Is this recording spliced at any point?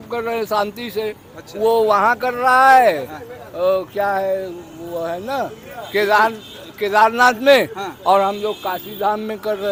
no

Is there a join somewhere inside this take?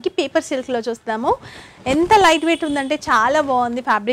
no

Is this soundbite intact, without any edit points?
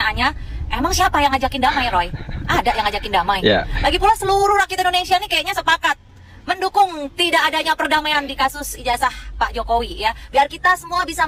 yes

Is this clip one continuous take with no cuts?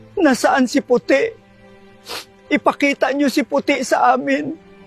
yes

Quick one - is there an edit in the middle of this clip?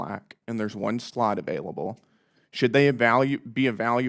no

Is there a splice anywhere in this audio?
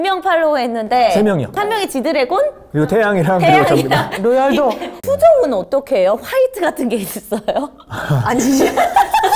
yes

